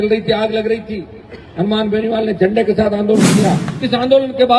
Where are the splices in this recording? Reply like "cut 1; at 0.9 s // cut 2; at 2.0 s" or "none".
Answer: cut 1; at 3.7 s